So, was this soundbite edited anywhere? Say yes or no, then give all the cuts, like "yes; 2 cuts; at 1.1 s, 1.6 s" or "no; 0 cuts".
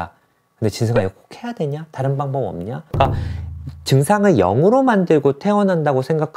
yes; 1 cut; at 2.9 s